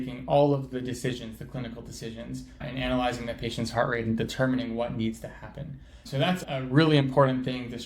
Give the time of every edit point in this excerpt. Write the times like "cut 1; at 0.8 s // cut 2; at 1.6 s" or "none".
cut 1; at 6.4 s